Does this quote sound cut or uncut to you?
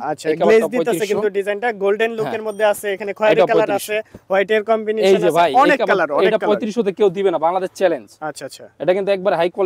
uncut